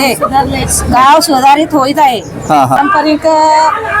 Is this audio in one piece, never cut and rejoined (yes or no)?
no